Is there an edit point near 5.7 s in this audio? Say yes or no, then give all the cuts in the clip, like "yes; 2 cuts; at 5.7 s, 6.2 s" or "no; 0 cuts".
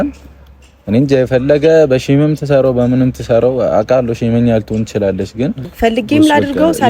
yes; 1 cut; at 5.7 s